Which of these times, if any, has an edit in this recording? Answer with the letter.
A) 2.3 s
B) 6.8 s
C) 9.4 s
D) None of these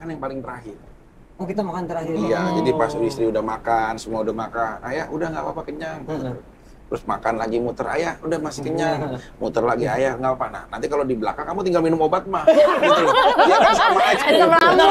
D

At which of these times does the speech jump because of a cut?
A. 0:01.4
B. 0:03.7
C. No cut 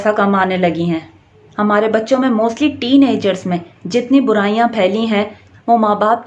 A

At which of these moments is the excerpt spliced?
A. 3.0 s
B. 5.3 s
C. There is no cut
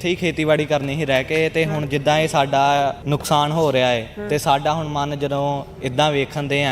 A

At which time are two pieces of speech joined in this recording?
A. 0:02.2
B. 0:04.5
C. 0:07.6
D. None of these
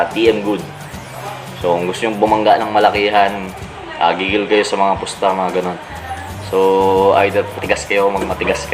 C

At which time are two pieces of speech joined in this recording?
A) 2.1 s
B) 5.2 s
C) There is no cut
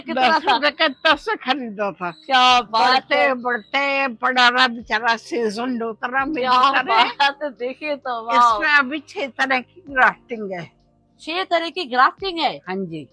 C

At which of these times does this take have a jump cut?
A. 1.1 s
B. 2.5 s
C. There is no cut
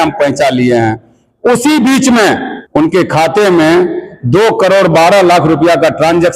B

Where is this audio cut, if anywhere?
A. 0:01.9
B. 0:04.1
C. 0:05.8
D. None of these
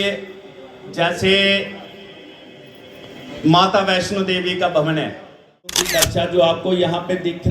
C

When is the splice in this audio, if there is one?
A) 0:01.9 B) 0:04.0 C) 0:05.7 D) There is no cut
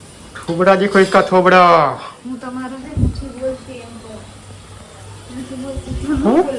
D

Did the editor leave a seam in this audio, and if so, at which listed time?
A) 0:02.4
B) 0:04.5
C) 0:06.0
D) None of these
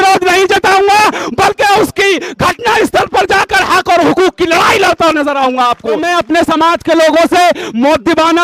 C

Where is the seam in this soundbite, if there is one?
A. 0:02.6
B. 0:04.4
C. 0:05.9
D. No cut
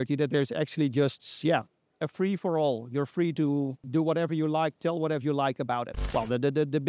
C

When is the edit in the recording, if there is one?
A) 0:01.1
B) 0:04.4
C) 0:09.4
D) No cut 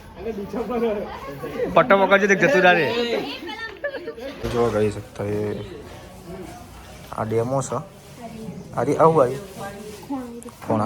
B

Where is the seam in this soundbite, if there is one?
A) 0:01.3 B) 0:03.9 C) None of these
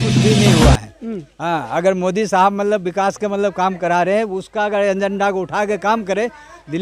C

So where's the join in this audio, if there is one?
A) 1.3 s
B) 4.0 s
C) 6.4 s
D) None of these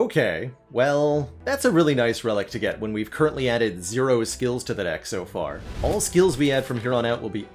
A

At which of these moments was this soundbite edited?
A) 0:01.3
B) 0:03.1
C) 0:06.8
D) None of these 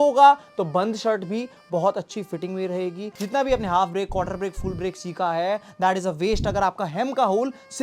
B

